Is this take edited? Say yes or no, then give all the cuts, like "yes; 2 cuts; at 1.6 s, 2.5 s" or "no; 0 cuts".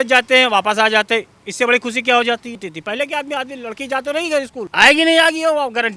yes; 2 cuts; at 2.7 s, 4.6 s